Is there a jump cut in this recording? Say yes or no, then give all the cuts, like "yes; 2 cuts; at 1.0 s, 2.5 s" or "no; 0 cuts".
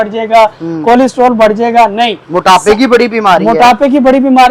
no; 0 cuts